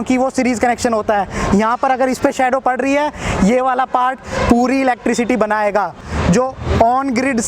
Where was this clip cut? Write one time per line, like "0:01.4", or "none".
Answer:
0:06.1